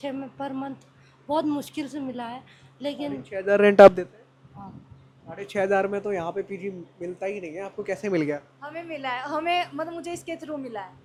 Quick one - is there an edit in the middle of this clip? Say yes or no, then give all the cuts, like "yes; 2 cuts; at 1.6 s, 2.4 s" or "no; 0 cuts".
no; 0 cuts